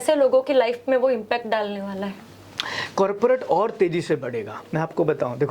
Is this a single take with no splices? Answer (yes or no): yes